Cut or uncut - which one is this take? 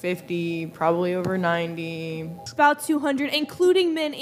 cut